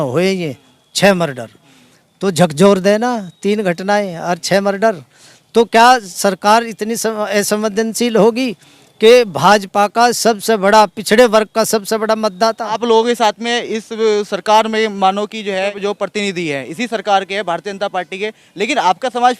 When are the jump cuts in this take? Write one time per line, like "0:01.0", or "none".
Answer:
0:12.8
0:15.7